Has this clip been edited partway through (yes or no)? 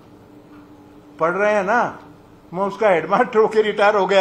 no